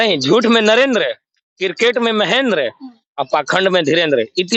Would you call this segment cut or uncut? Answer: uncut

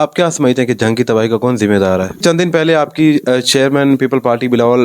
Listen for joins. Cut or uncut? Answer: cut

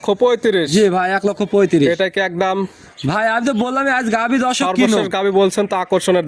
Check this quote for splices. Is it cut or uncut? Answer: uncut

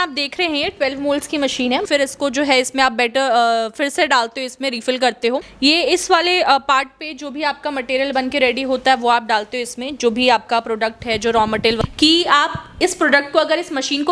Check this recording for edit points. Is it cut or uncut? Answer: cut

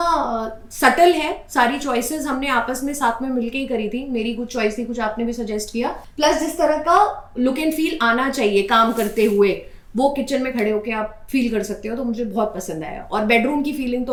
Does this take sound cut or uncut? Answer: uncut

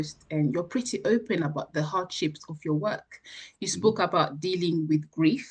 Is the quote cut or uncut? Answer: uncut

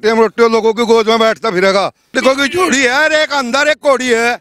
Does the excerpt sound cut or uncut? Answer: cut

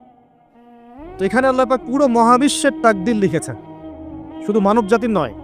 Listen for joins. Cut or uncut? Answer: uncut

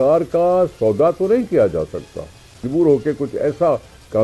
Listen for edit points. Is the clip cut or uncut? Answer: cut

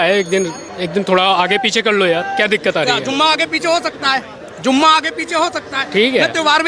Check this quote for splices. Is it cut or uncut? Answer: uncut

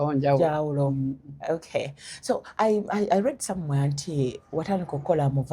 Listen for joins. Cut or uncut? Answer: uncut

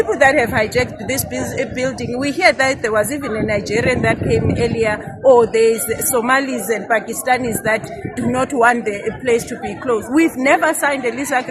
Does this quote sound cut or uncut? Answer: uncut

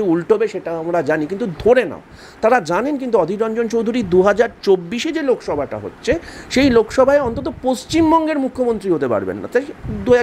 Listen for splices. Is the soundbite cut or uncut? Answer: uncut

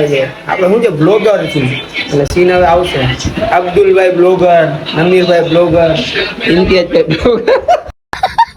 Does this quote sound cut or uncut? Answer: uncut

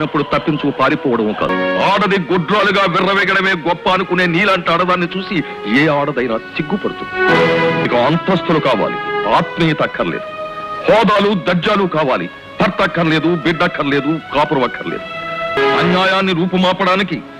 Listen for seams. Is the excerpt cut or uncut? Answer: cut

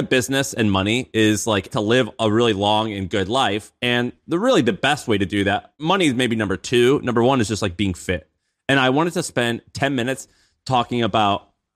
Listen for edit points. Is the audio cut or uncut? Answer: cut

